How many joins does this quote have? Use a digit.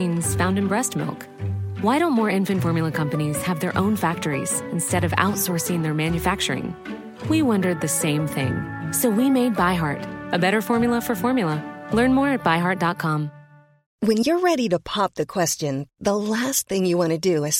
1